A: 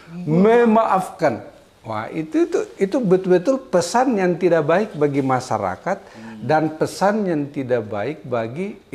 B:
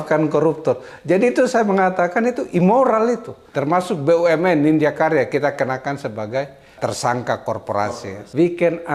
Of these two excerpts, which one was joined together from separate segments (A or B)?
B